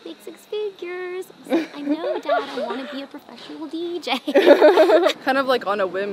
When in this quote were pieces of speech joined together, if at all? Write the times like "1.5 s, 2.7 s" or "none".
5.2 s